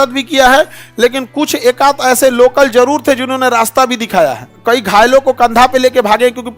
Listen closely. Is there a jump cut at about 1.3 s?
no; 1 cut; at 4.5 s

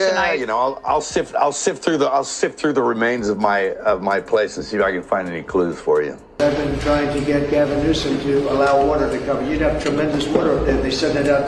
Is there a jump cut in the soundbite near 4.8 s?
no; 1 cut; at 6.2 s

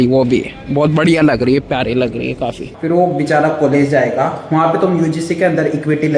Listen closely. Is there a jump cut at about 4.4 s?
no; 1 cut; at 2.7 s

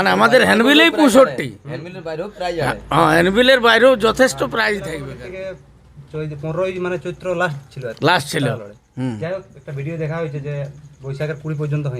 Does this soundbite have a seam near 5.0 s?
yes; 1 cut; at 5.0 s

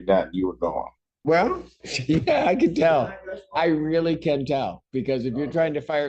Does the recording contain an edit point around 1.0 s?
yes; 1 cut; at 1.0 s

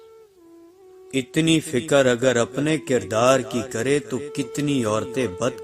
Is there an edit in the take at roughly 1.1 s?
yes; 1 cut; at 1.1 s

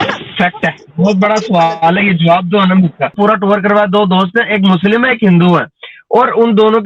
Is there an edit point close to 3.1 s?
yes; 1 cut; at 3.1 s

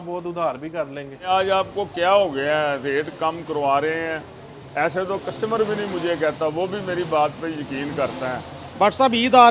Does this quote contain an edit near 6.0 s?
no; 1 cut; at 1.3 s

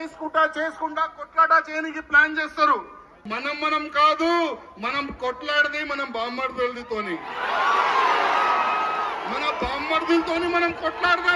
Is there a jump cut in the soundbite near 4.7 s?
no; 1 cut; at 3.1 s

